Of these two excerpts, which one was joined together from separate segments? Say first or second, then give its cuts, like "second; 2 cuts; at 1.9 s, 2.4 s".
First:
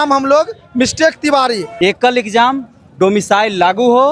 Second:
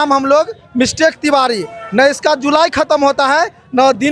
first; 1 cut; at 1.7 s